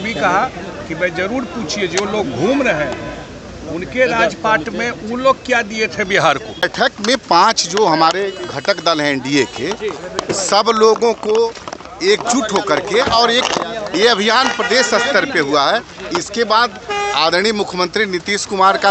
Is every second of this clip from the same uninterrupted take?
no; 1 cut; at 6.5 s

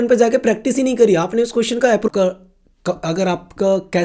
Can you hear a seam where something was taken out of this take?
yes; 1 cut; at 2.1 s

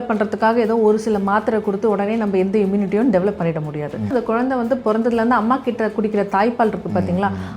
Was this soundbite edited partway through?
yes; 1 cut; at 4.1 s

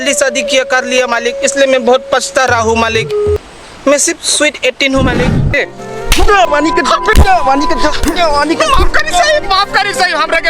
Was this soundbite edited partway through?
yes; 2 cuts; at 3.4 s, 5.5 s

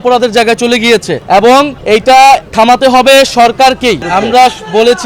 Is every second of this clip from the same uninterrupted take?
no; 4 cuts; at 1.1 s, 1.8 s, 2.5 s, 4.0 s

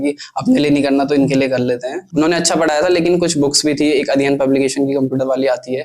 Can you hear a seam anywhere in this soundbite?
yes; 1 cut; at 2.0 s

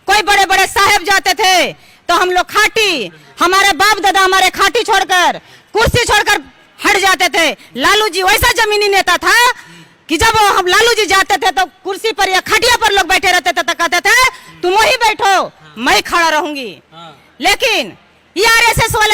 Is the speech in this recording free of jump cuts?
yes; 0 cuts

